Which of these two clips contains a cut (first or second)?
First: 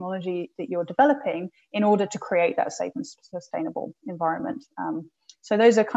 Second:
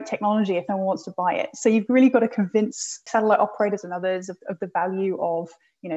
second